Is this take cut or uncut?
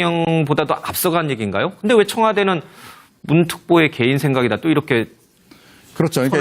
uncut